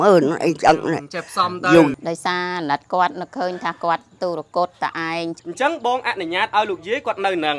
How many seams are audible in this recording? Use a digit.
2